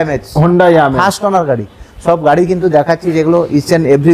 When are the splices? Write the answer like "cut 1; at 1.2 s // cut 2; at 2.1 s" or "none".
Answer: none